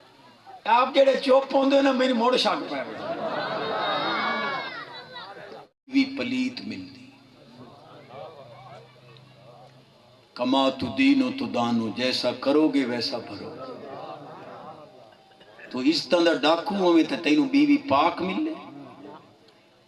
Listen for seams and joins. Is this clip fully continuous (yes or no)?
no